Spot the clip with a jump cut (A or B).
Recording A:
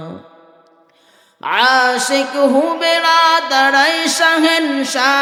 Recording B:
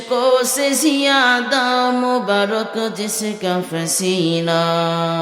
B